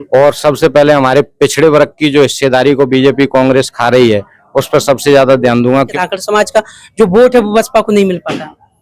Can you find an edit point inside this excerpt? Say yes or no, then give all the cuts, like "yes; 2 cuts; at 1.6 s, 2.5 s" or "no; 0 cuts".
yes; 1 cut; at 5.9 s